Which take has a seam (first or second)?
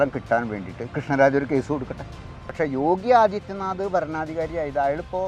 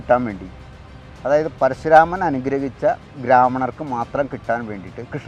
first